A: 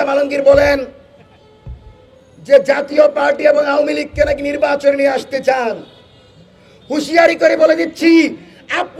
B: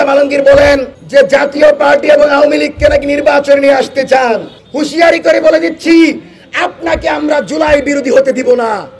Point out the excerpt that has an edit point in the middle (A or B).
B